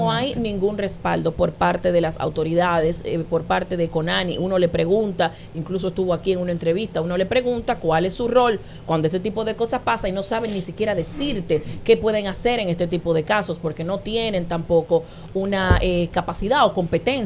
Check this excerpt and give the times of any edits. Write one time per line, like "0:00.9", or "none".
none